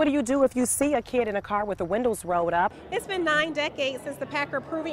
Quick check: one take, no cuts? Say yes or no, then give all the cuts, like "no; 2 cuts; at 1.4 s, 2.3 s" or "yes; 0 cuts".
no; 1 cut; at 2.8 s